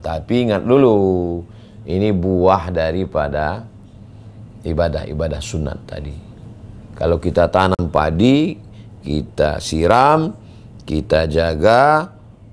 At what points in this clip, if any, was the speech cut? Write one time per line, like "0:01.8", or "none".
none